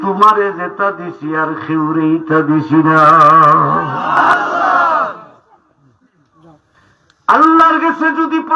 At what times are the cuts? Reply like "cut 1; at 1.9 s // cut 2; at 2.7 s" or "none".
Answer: cut 1; at 4.3 s // cut 2; at 6.8 s